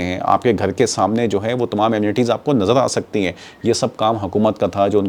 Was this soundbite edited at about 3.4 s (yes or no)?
no